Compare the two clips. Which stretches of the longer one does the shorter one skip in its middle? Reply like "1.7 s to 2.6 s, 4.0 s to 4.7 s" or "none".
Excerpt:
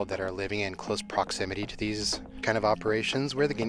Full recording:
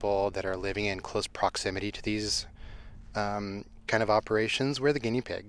2.5 s to 3.7 s